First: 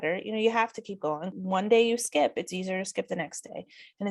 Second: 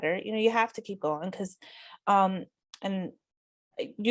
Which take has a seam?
first; 1 cut; at 1.3 s

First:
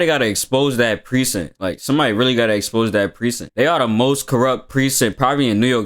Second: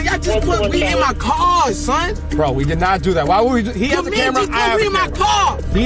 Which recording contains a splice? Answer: first; 1 cut; at 3.4 s

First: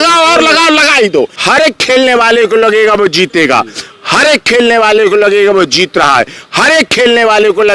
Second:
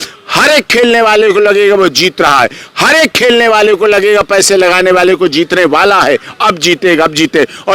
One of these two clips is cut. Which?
first; 1 cut; at 1.3 s

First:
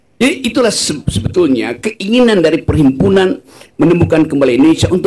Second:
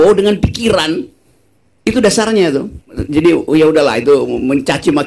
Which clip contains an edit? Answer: second; 1 cut; at 3.0 s

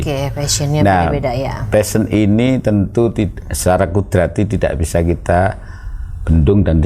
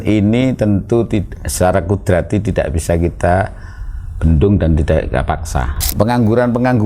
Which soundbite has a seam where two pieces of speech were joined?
second; 1 cut; at 5.8 s

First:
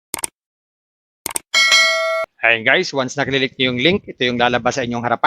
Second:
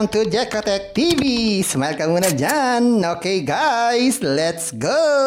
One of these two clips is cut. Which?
first; 1 cut; at 2.3 s

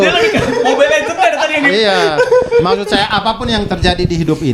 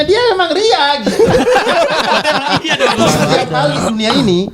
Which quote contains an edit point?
second; 1 cut; at 3.3 s

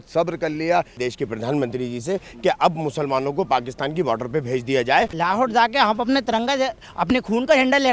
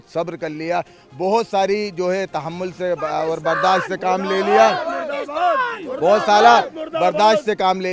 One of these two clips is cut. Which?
first; 2 cuts; at 1.0 s, 5.1 s

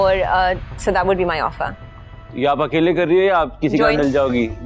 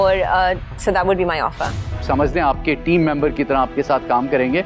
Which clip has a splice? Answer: second; 1 cut; at 2.0 s

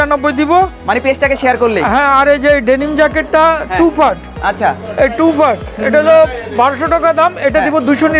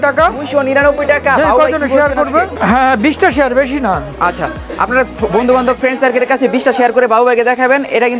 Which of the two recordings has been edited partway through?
second; 1 cut; at 2.5 s

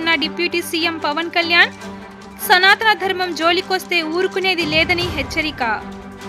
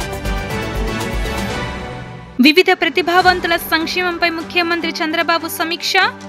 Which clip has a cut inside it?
second; 1 cut; at 1.7 s

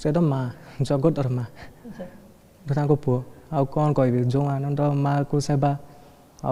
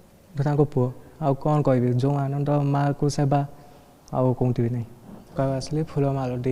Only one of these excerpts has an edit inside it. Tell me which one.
second; 1 cut; at 5.3 s

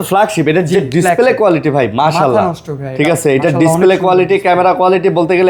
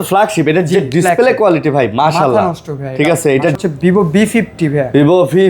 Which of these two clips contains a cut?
second; 1 cut; at 3.6 s

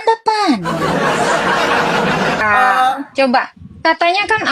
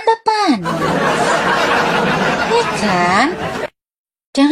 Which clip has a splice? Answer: first; 1 cut; at 2.4 s

